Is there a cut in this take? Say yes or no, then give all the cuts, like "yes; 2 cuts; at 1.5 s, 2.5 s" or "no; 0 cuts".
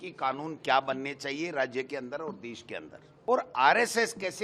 yes; 1 cut; at 3.3 s